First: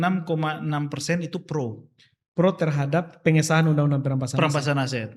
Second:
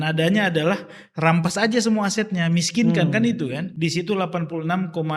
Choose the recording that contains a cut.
second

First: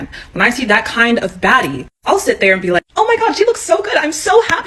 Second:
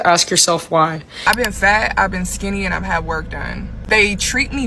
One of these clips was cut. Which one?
second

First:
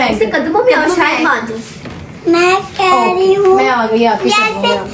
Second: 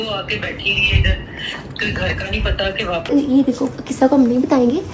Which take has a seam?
second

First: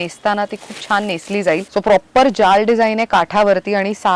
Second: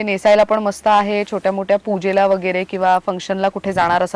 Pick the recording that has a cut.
first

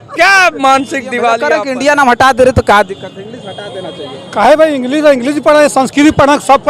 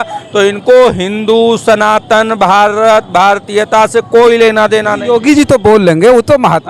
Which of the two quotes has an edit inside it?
first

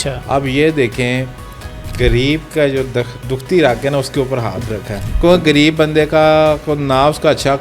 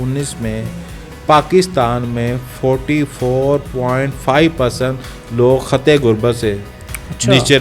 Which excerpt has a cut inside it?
first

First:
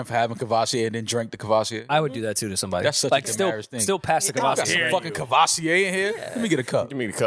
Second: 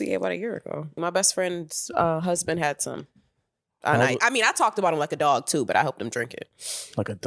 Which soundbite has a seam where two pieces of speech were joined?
second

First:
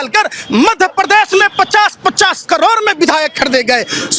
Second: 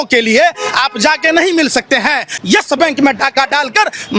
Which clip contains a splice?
second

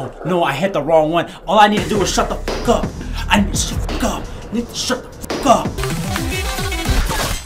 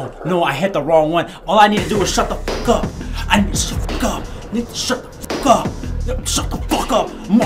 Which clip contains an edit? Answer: first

